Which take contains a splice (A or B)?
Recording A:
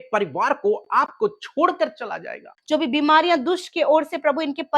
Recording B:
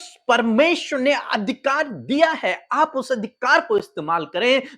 A